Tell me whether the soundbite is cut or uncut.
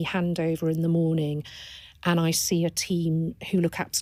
uncut